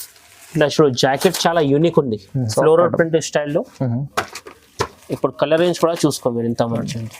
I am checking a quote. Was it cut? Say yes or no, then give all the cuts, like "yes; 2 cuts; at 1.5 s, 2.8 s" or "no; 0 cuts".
yes; 1 cut; at 2.4 s